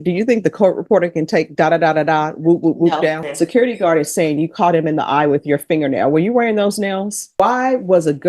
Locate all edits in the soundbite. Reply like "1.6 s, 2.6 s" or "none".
3.3 s, 7.3 s